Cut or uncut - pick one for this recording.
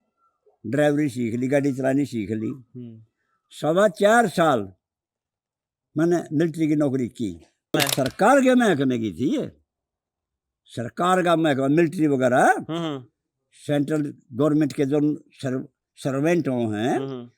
cut